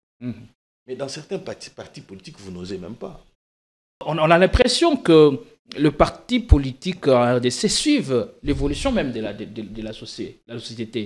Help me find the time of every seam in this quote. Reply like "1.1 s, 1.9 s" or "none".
4.0 s